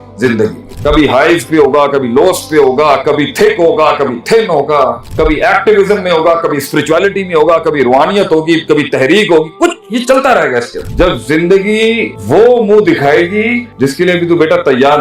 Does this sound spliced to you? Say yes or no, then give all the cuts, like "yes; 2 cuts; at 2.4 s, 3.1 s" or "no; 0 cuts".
yes; 1 cut; at 10.8 s